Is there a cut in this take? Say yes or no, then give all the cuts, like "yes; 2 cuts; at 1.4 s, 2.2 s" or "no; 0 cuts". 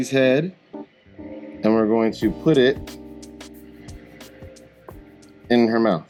no; 0 cuts